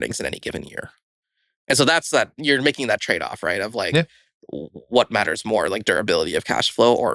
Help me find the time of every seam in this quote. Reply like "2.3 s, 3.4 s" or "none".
none